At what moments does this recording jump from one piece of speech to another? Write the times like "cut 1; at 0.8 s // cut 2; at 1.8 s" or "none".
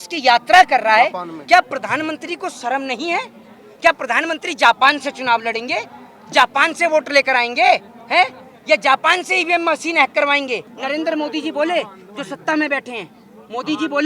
cut 1; at 10.7 s